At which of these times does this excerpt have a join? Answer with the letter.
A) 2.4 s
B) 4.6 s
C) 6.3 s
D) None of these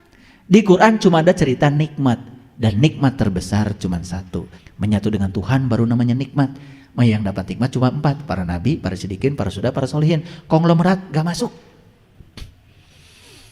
B